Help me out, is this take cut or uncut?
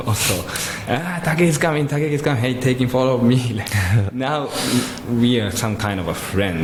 uncut